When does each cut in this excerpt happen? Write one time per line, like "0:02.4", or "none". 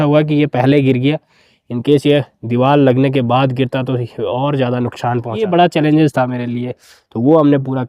0:05.4